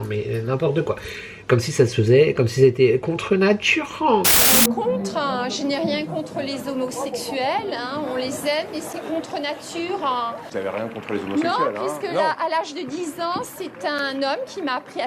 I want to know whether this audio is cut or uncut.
uncut